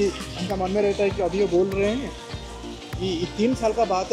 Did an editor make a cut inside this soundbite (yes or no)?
no